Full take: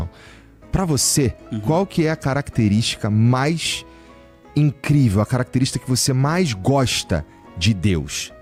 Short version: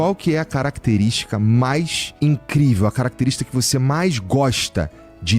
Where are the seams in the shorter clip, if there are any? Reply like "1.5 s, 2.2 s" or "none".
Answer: 2.0 s